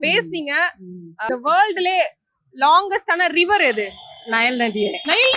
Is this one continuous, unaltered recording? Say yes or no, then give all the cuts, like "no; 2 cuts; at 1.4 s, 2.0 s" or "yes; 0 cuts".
no; 1 cut; at 1.2 s